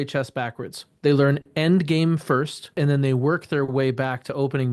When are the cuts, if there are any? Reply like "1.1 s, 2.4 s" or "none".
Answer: 2.7 s